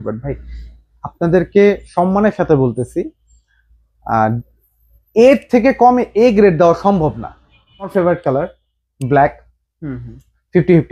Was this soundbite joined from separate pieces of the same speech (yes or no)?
yes